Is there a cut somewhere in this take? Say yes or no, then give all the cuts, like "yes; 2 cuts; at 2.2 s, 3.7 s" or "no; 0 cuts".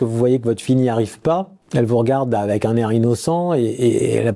no; 0 cuts